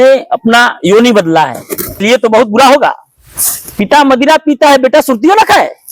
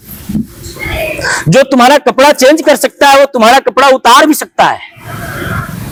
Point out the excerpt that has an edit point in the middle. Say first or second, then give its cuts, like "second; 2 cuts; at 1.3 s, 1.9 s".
first; 1 cut; at 1.9 s